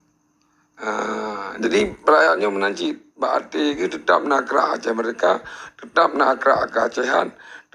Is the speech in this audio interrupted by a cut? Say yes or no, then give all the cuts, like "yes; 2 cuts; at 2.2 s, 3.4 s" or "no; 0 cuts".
no; 0 cuts